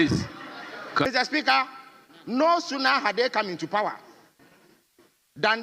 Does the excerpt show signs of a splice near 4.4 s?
no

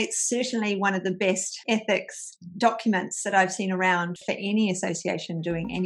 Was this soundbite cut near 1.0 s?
no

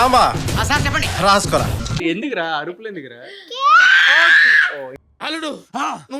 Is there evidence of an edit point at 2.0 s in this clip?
yes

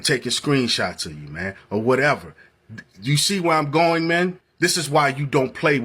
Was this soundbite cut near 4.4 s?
yes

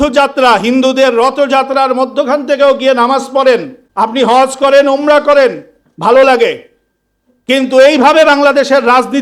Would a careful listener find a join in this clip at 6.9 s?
no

